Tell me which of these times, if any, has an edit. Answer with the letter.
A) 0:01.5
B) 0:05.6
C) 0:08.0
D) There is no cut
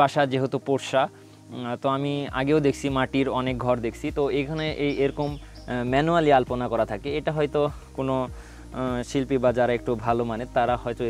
D